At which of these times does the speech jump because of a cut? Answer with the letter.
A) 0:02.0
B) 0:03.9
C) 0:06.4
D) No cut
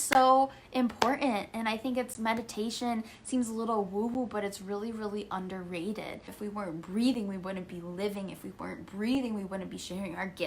C